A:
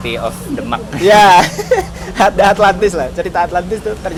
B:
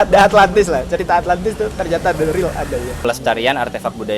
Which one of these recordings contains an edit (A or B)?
B